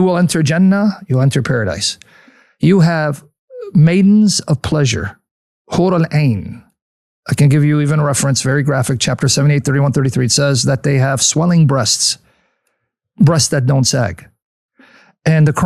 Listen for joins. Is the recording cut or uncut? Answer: uncut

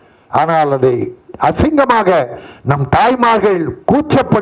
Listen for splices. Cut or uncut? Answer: uncut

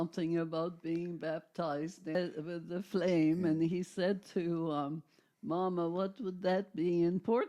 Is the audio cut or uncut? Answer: cut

